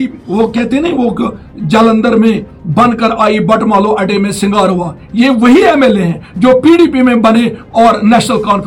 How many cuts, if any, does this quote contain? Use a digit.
0